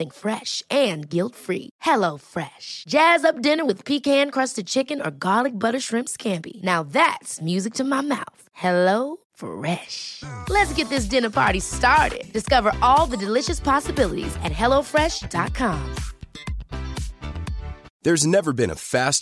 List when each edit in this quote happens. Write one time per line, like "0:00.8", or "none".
0:17.9